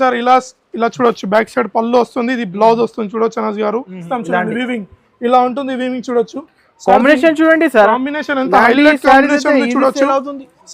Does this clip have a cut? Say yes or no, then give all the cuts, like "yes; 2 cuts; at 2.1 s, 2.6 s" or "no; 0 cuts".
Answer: yes; 1 cut; at 4.0 s